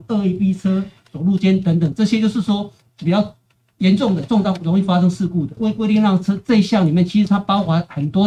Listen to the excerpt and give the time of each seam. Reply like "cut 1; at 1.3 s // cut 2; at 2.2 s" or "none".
cut 1; at 5.5 s